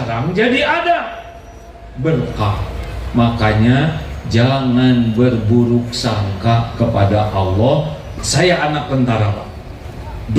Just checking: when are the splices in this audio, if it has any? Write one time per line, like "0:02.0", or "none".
0:08.0